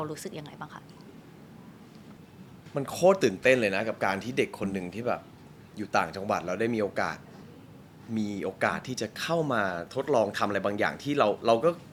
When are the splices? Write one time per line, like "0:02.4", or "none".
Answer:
none

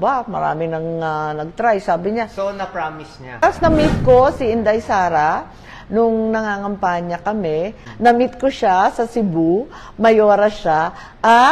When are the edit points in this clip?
0:03.4
0:07.8

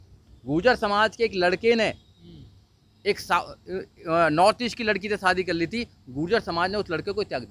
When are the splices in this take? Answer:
none

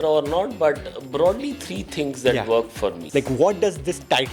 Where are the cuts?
0:03.0

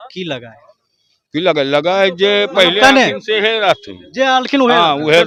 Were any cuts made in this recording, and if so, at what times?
none

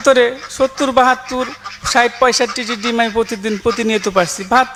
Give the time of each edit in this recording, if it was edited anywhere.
none

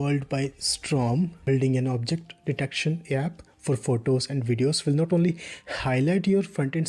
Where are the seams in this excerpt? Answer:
0:01.4

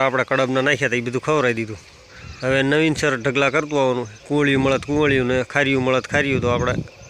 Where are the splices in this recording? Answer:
0:04.2

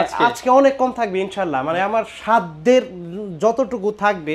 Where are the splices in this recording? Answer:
none

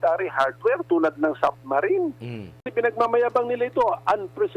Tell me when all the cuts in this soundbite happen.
0:02.6

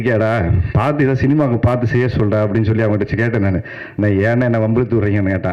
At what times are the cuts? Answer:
none

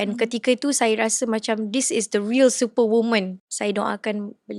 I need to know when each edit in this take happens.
0:03.4

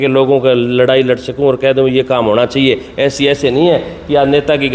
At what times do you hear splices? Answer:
none

